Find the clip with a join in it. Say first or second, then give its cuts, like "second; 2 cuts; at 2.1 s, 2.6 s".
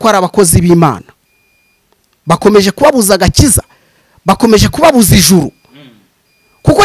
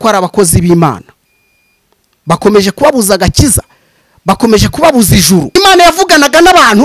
second; 1 cut; at 5.6 s